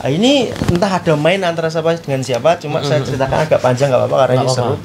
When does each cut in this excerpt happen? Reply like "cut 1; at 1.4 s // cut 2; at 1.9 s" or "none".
none